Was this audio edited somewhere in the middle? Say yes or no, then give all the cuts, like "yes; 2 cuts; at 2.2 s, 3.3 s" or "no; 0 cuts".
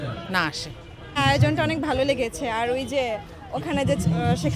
no; 0 cuts